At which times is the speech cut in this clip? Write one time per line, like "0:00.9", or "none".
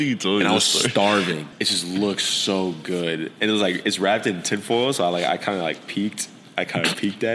0:01.5